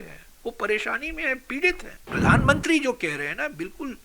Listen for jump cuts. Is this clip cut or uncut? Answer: cut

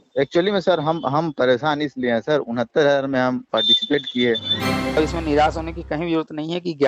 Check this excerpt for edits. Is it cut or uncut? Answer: cut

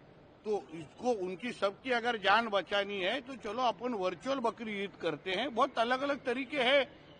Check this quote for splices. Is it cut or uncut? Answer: uncut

